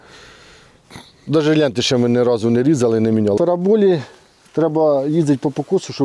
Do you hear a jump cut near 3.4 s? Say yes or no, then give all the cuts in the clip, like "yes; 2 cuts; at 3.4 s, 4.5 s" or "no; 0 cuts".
yes; 1 cut; at 3.4 s